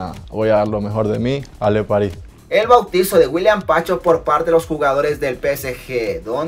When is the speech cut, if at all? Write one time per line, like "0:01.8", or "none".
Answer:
0:02.3